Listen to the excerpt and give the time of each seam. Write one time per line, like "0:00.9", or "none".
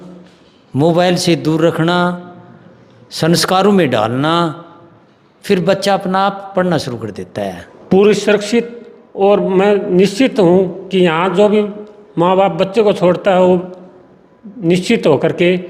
0:07.7